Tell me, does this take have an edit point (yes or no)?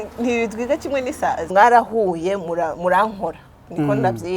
yes